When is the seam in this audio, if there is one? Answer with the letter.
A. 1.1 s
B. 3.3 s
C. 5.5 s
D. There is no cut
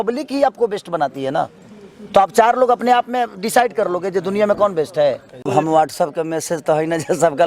C